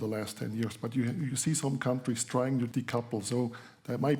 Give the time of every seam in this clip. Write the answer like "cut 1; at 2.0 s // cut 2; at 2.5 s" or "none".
cut 1; at 2.7 s